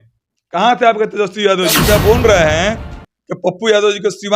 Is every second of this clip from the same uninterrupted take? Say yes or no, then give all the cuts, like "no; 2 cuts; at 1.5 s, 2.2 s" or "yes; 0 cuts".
no; 1 cut; at 1.8 s